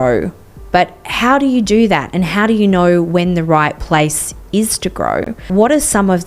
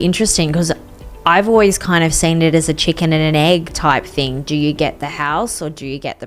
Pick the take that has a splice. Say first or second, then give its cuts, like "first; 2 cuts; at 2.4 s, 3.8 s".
first; 1 cut; at 5.3 s